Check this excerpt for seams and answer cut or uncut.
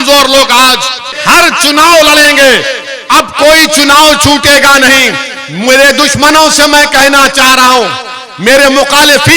cut